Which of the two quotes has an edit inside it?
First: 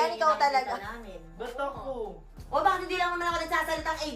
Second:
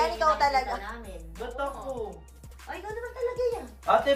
first; 1 cut; at 2.4 s

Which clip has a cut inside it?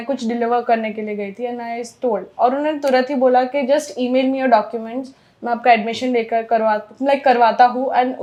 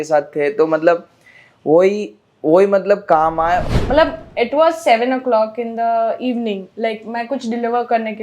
second; 1 cut; at 3.6 s

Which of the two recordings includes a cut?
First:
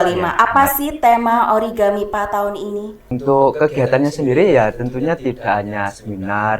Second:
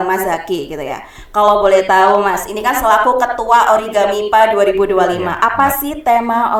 first; 1 cut; at 3.1 s

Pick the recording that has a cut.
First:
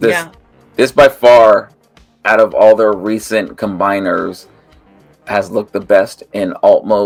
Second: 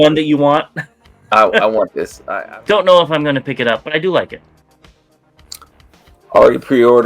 second; 1 cut; at 2.2 s

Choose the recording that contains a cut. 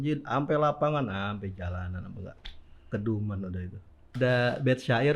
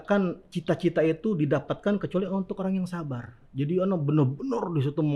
first; 1 cut; at 4.0 s

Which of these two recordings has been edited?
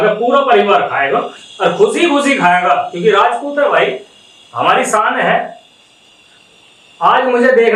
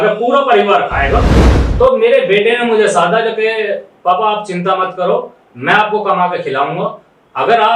second; 1 cut; at 1.4 s

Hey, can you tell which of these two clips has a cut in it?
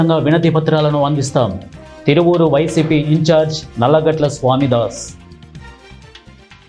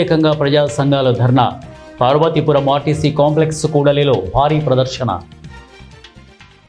first; 1 cut; at 5.5 s

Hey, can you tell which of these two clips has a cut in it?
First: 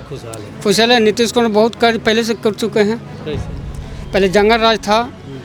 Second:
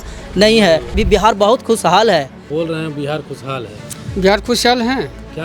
second; 2 cuts; at 1.0 s, 2.4 s

